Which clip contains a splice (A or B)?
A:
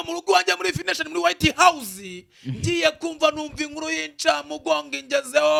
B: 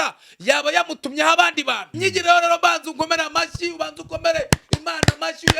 B